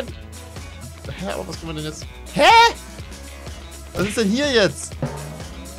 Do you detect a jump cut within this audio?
no; 0 cuts

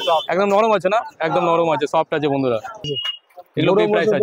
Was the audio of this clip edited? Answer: yes; 1 cut; at 3.0 s

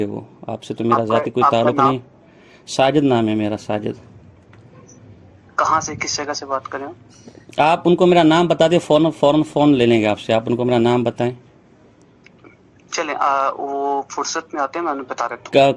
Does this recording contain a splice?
no; 0 cuts

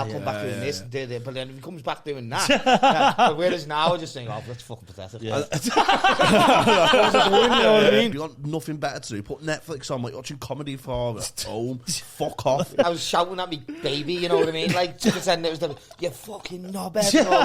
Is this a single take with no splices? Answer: no; 2 cuts; at 8.1 s, 12.8 s

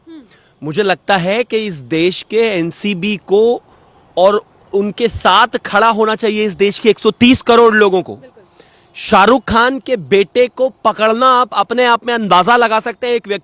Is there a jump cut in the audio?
no; 0 cuts

